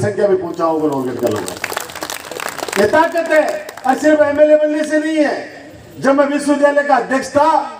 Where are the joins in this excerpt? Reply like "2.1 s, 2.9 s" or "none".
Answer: none